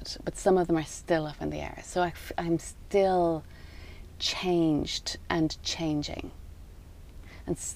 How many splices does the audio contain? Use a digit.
0